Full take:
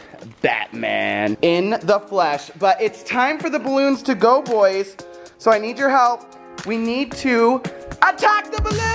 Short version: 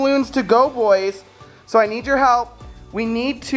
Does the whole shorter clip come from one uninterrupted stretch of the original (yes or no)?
yes